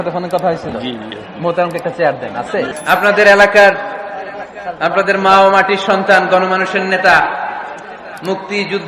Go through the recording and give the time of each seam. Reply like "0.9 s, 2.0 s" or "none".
2.8 s